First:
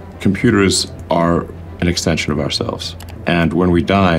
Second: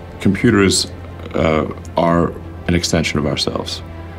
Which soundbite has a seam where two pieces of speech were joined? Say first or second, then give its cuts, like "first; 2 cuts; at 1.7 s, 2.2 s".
first; 2 cuts; at 0.9 s, 3.2 s